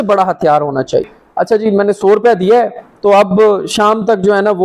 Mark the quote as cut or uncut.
cut